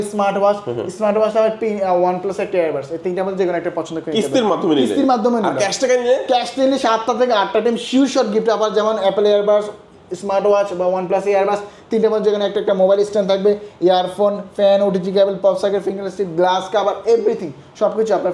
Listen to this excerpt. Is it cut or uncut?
uncut